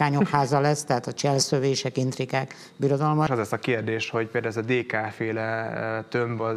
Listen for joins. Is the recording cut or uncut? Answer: cut